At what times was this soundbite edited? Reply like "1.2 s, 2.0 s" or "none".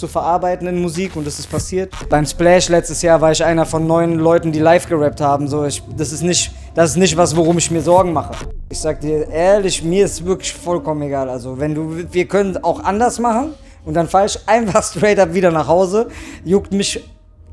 2.0 s, 8.6 s